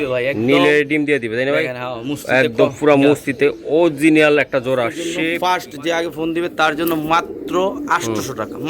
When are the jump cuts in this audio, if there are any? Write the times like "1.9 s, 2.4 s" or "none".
5.2 s